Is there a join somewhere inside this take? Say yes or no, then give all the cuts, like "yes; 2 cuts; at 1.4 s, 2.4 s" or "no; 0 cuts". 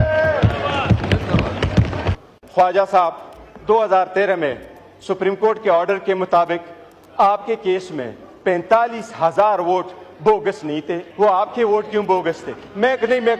yes; 2 cuts; at 2.3 s, 11.1 s